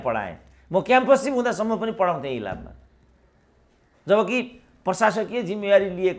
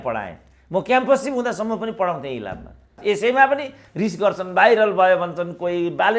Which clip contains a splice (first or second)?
second